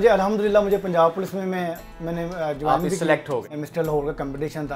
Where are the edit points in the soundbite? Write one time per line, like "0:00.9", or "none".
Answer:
0:03.5

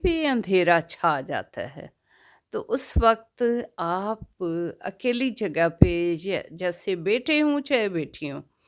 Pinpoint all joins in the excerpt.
none

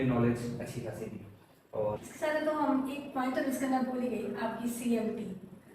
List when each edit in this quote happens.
0:02.0

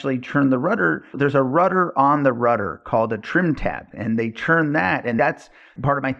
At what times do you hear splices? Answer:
0:05.2

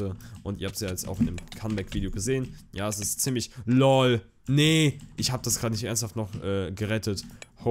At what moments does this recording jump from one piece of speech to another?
none

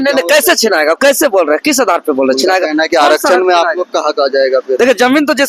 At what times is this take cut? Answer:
none

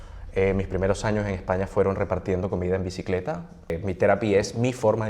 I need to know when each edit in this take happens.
0:03.8

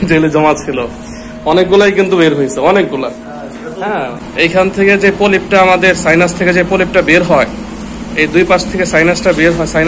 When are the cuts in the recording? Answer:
0:04.1

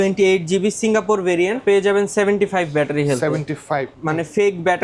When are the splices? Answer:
0:01.6
0:03.9

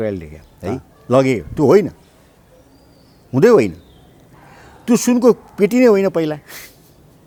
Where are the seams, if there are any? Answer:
none

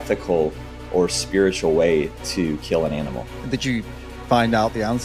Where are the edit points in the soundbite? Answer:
0:03.3

